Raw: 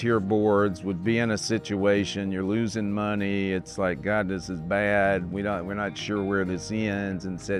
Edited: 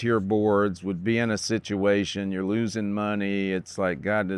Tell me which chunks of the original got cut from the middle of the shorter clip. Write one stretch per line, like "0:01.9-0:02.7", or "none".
none